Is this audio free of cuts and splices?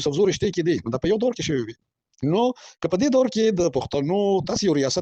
yes; 0 cuts

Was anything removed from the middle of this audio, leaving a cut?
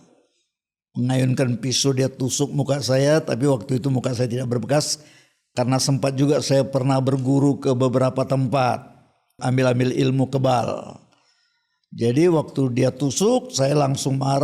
yes; 1 cut; at 9.4 s

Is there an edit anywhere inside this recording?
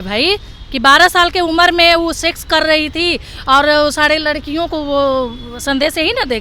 no; 0 cuts

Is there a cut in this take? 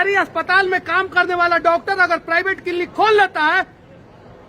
no; 0 cuts

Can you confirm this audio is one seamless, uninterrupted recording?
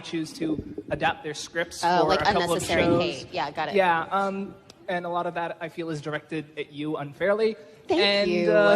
no; 1 cut; at 7.6 s

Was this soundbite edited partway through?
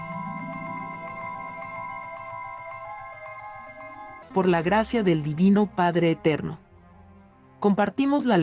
yes; 1 cut; at 3.8 s

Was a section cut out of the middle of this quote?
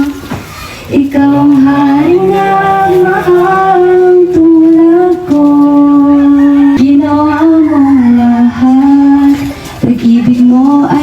yes; 1 cut; at 6.8 s

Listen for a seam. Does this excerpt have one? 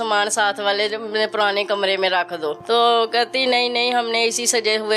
yes; 1 cut; at 2.6 s

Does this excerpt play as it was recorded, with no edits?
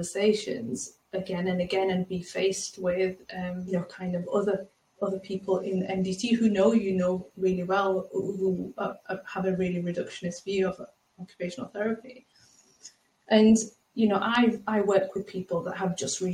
no; 1 cut; at 3.7 s

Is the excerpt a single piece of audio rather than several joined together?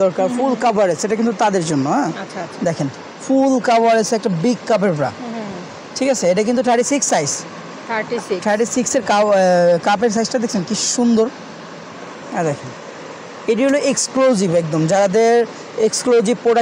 yes; 0 cuts

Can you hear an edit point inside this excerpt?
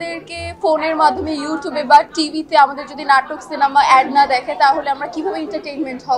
no; 0 cuts

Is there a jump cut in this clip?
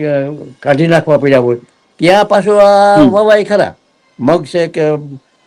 no; 0 cuts

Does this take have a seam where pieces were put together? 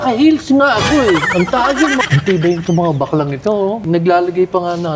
no; 0 cuts

